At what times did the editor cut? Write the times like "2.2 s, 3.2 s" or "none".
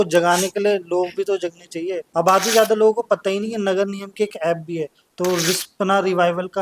2.0 s, 5.0 s